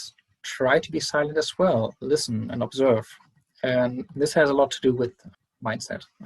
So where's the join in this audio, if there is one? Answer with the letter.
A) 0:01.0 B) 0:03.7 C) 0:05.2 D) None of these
C